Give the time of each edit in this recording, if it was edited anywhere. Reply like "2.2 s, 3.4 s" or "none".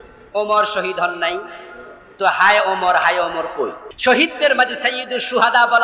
3.8 s